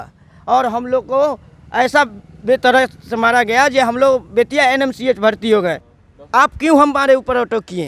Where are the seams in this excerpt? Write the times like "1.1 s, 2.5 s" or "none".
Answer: 5.9 s